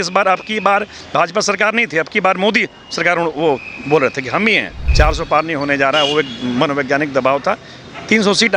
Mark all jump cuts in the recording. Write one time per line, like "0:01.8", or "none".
0:04.8